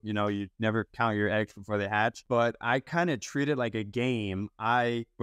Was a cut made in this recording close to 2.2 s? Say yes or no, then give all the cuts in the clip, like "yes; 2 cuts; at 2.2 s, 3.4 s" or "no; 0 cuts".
no; 0 cuts